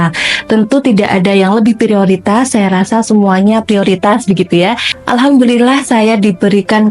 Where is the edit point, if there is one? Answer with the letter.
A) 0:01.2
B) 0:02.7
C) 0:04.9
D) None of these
C